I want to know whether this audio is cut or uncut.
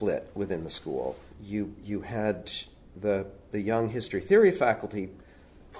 cut